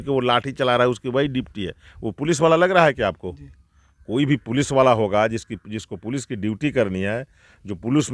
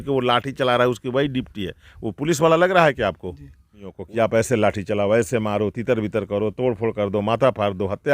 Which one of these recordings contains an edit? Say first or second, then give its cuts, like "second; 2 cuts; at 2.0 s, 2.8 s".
second; 1 cut; at 4.0 s